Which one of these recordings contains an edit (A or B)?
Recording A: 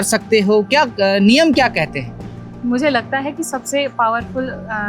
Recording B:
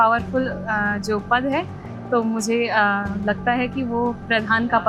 A